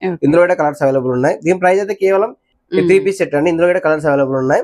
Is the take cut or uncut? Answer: cut